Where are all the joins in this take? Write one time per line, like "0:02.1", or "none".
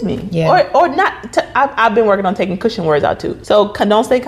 0:03.3